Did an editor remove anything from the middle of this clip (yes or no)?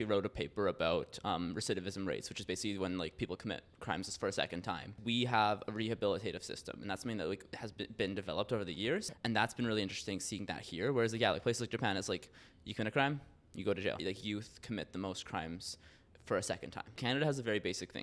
yes